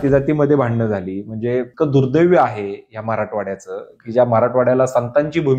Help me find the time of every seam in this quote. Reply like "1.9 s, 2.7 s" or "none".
1.7 s